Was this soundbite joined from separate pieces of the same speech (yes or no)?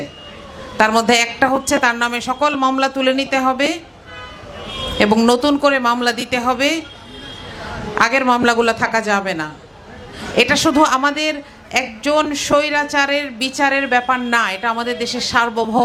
no